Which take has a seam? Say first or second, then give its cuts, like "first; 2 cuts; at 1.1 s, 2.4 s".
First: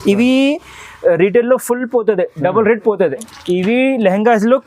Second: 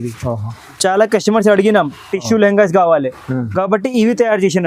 first; 1 cut; at 3.3 s